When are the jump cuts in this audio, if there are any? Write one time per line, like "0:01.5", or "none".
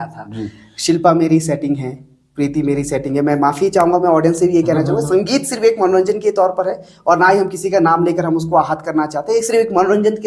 none